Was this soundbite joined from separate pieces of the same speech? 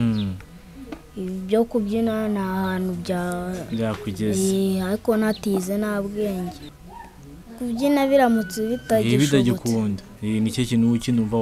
yes; 1 cut; at 6.6 s

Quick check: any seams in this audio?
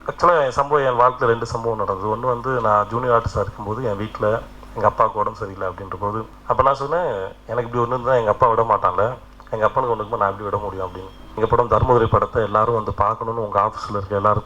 yes; 2 cuts; at 6.3 s, 11.2 s

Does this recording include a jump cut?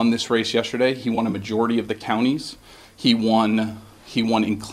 no; 0 cuts

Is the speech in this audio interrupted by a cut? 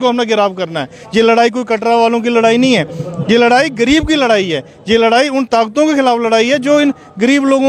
no; 0 cuts

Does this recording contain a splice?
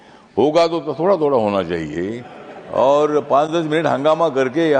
no; 0 cuts

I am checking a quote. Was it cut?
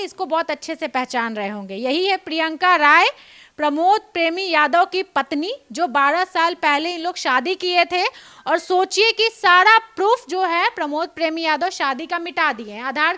no; 0 cuts

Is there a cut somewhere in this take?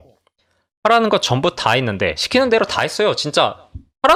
no; 0 cuts

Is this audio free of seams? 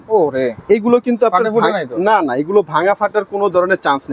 yes; 0 cuts

